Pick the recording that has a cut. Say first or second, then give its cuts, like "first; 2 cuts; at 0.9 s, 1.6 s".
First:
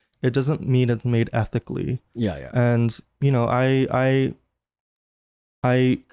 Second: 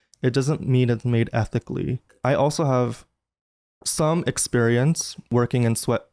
second; 2 cuts; at 2.1 s, 5.3 s